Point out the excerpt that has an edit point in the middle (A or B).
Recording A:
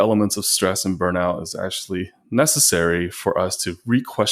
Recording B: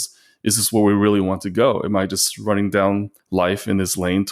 B